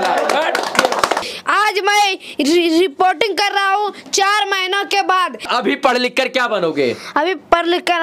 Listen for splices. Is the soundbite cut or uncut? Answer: cut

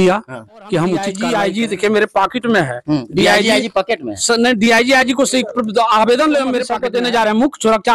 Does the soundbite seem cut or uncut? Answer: cut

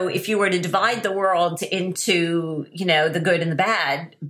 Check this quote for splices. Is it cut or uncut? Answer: uncut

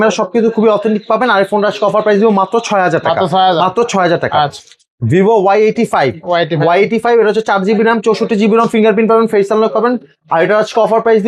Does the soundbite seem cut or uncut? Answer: uncut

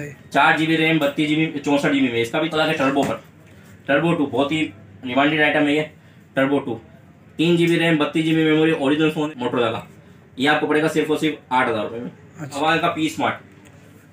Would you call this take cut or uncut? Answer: cut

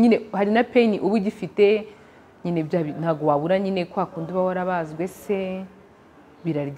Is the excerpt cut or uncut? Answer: uncut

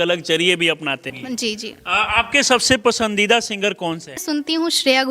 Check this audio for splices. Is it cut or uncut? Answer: cut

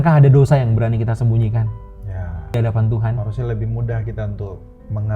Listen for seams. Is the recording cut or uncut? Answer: cut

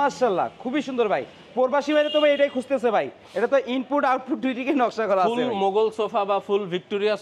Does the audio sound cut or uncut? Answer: uncut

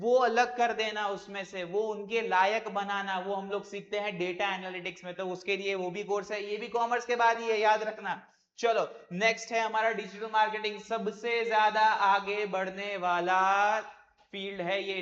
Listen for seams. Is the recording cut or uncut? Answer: uncut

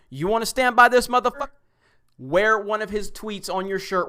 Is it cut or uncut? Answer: cut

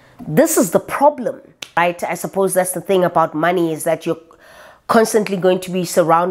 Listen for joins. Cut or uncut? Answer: cut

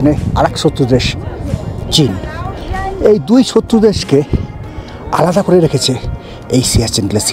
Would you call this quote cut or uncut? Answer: uncut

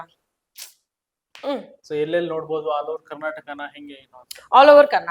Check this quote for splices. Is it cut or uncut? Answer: cut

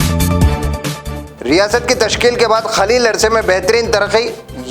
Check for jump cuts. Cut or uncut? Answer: cut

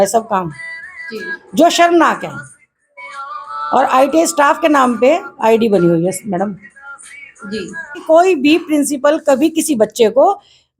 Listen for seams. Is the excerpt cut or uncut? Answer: cut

